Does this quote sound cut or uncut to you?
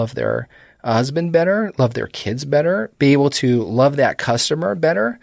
uncut